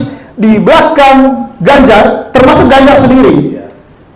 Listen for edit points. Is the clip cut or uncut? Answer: uncut